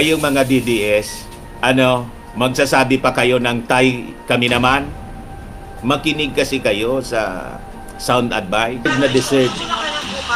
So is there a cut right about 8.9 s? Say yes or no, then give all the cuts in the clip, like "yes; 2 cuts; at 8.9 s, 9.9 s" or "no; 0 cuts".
yes; 1 cut; at 8.9 s